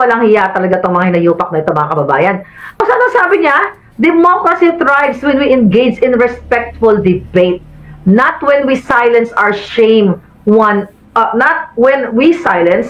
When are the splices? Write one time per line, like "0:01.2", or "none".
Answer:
0:02.8